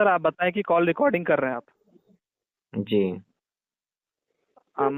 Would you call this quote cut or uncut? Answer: uncut